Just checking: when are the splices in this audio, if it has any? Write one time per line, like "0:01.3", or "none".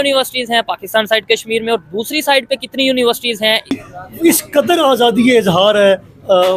0:03.9